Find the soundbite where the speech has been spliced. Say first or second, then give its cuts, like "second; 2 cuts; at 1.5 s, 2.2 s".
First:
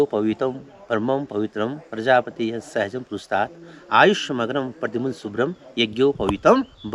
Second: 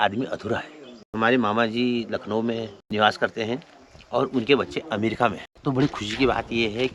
second; 3 cuts; at 1.1 s, 2.8 s, 5.5 s